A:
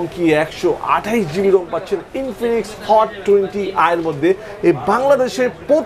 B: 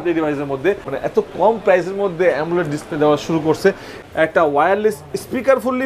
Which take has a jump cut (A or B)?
B